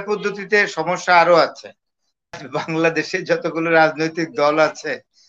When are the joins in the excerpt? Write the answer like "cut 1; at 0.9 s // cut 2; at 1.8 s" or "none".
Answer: cut 1; at 2.4 s